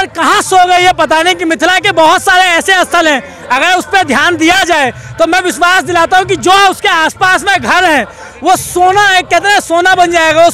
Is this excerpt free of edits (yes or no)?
yes